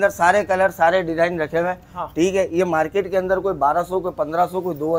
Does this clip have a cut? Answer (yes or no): no